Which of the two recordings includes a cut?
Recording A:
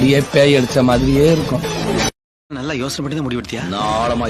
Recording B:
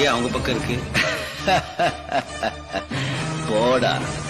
A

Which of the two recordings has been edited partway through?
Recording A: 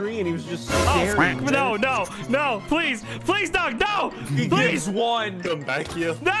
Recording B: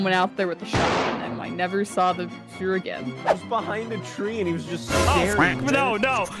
B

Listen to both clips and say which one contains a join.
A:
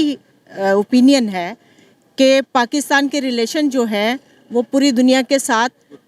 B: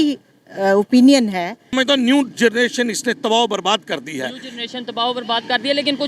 B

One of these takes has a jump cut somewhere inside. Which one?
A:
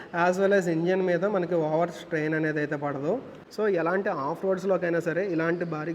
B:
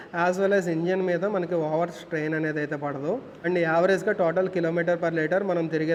A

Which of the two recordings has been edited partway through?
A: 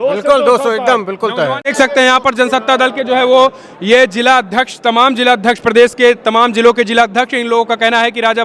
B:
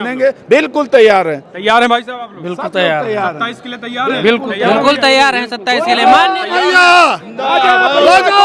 A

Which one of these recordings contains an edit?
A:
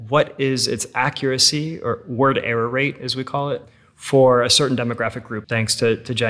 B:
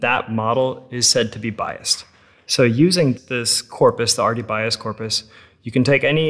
A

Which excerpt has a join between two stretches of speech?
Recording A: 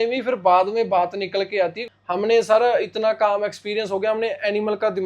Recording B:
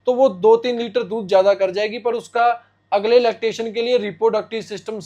A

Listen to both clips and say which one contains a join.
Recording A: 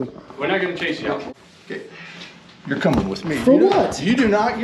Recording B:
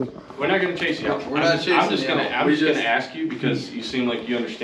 A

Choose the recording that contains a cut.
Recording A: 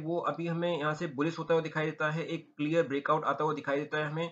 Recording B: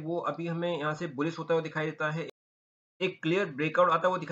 B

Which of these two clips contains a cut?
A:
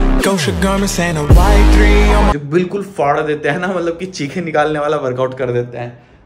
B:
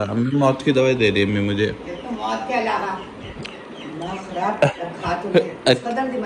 A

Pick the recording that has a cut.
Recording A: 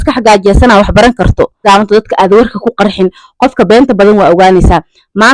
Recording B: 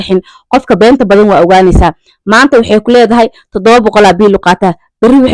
A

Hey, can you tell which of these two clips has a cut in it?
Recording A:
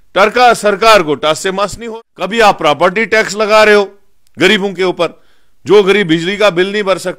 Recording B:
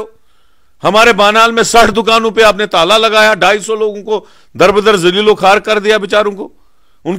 A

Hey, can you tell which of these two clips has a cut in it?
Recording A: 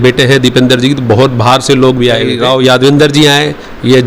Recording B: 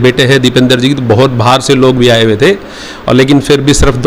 A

